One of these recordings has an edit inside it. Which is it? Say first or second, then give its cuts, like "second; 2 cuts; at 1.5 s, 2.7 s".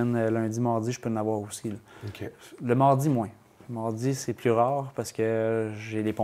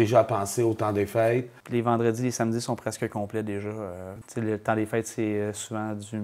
second; 2 cuts; at 1.6 s, 4.1 s